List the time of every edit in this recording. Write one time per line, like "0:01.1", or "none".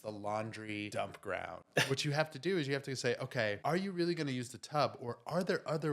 0:00.9
0:01.9
0:03.6